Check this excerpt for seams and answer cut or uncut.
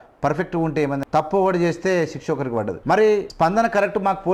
cut